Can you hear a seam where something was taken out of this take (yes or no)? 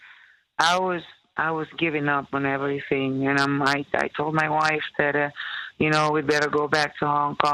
no